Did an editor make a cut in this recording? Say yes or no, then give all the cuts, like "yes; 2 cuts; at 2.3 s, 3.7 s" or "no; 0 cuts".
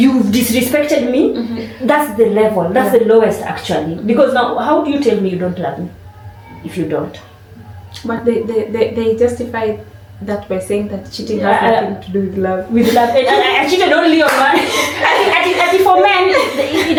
no; 0 cuts